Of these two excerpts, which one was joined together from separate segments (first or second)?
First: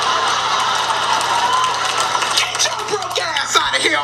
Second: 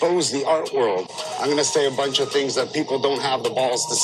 second